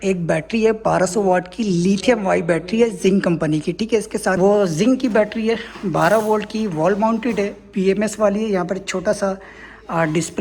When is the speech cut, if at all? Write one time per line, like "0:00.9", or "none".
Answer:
0:04.4